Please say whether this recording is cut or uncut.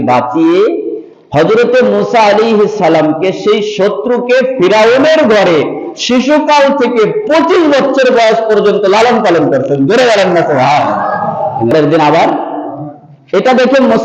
cut